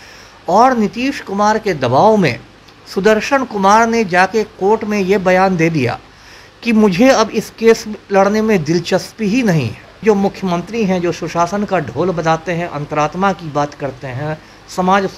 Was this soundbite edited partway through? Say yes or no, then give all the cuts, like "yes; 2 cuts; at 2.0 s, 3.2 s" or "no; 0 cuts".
yes; 1 cut; at 9.8 s